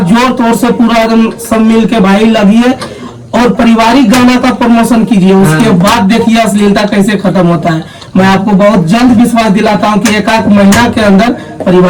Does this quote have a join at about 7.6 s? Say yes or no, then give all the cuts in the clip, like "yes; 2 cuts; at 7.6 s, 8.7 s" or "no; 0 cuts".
no; 0 cuts